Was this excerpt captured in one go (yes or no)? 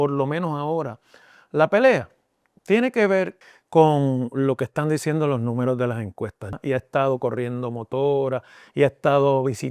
no